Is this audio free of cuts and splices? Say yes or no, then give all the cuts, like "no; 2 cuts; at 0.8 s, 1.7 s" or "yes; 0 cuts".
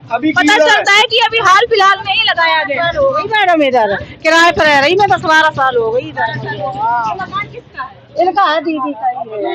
yes; 0 cuts